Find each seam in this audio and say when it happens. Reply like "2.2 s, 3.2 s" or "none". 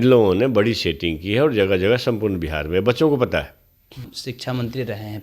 4.2 s